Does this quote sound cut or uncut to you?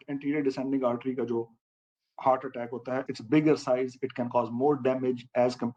uncut